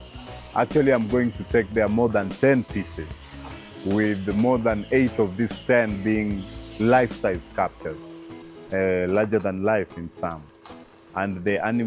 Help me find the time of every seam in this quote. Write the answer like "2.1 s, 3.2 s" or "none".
none

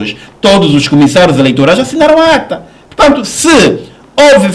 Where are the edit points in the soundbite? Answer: none

